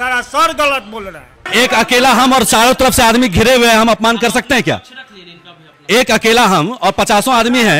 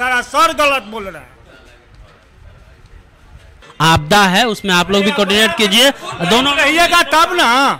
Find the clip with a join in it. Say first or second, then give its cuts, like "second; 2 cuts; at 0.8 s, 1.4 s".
first; 1 cut; at 1.4 s